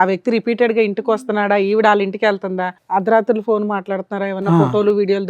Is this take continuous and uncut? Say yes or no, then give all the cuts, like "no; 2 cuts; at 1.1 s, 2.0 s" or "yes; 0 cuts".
no; 1 cut; at 2.7 s